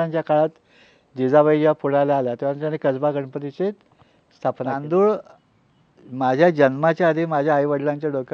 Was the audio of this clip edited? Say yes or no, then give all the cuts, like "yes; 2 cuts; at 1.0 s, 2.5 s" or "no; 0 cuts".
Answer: yes; 1 cut; at 4.8 s